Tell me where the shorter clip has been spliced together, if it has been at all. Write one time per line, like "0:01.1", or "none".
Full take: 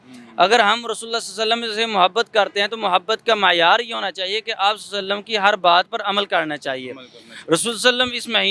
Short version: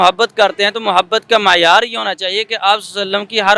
none